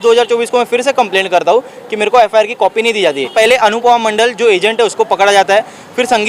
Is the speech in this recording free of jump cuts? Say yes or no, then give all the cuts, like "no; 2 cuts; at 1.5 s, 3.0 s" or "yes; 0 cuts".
no; 1 cut; at 3.2 s